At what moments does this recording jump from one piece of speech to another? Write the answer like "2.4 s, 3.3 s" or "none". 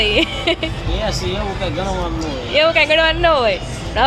none